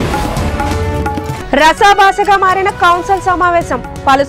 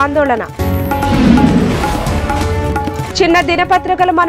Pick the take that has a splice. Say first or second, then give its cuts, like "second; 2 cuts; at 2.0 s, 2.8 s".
first; 1 cut; at 1.2 s